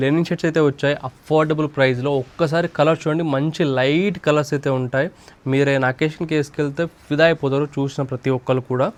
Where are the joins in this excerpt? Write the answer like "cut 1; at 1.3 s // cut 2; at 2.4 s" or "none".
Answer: none